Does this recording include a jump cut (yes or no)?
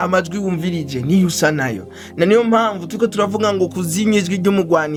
no